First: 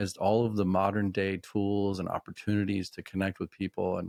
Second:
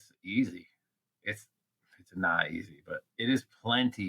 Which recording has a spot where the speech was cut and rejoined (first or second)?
second